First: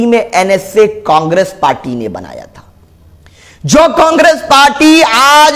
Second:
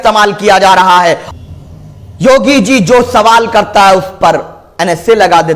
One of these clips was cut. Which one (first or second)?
second